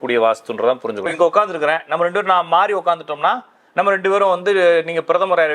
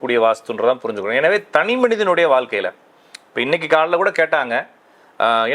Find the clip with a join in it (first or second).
first